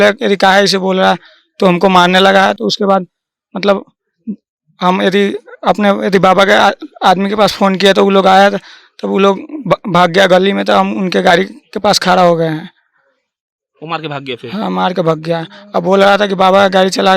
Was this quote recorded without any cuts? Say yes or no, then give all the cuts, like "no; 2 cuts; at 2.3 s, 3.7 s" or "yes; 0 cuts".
yes; 0 cuts